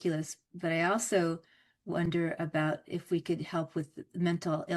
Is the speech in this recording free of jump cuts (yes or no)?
yes